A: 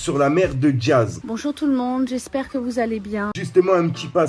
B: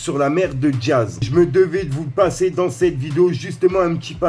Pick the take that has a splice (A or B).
A